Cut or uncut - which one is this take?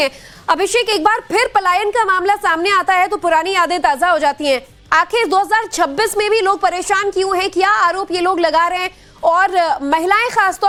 uncut